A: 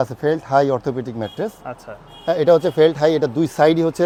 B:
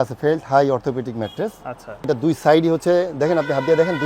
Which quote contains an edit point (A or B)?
B